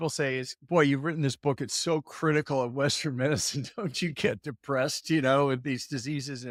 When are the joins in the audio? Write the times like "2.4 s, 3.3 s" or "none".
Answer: none